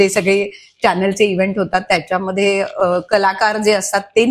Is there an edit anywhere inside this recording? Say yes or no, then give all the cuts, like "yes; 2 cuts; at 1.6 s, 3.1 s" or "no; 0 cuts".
no; 0 cuts